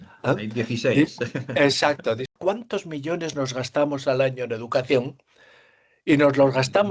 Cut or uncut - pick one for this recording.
cut